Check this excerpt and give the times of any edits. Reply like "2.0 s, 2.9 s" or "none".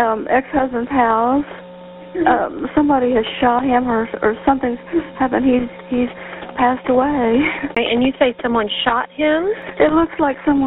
7.8 s